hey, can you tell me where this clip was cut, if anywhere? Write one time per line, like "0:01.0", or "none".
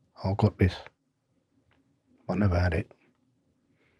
none